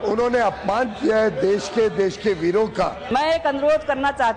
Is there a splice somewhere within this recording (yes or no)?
yes